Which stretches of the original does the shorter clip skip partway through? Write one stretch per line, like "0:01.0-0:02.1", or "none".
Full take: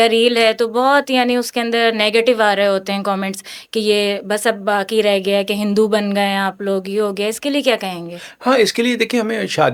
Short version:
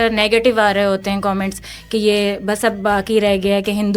none